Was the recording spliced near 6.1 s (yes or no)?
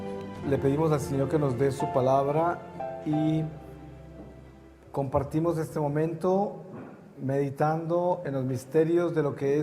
yes